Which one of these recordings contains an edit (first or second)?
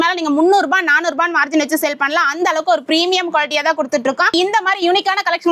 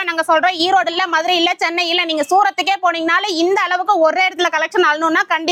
first